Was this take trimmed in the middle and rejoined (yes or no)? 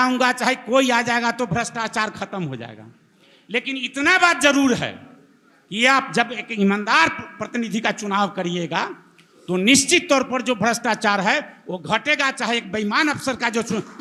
no